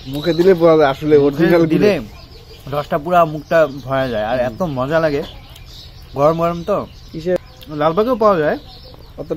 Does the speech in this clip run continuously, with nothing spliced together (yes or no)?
no